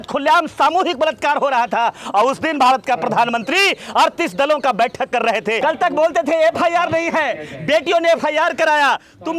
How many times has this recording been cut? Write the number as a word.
one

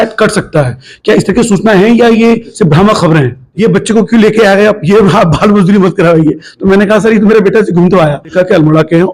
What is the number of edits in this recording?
two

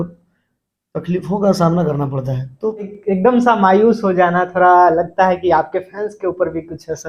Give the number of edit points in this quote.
one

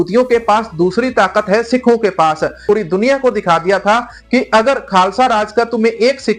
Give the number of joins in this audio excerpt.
one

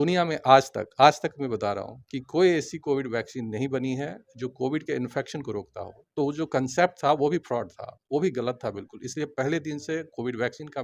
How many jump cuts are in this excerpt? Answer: zero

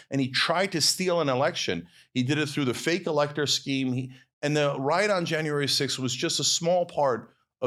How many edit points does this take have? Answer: zero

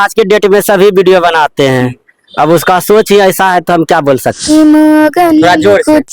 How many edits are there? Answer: one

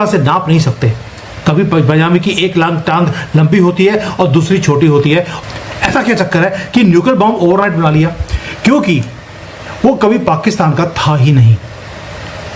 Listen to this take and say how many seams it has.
one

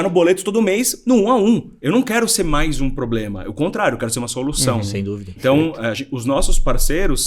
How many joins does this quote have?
two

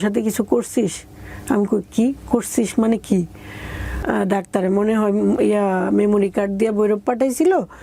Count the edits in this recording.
one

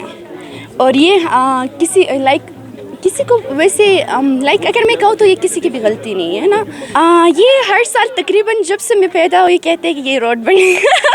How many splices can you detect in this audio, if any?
one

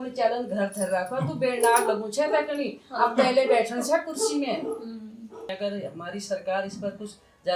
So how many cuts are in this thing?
one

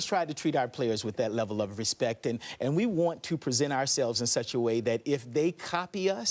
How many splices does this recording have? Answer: zero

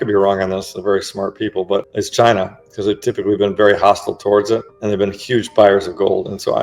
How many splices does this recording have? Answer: two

